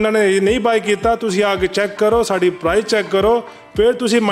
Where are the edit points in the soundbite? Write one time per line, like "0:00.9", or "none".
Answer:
none